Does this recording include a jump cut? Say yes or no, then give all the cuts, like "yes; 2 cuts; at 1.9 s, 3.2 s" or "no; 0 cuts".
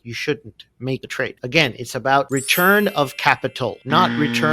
yes; 1 cut; at 1.3 s